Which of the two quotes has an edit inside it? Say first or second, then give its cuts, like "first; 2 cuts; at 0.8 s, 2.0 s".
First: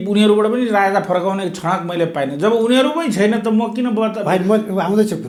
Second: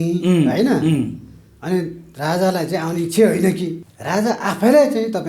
second; 1 cut; at 3.9 s